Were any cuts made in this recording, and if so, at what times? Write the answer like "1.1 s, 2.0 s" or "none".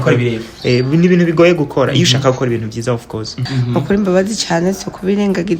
3.5 s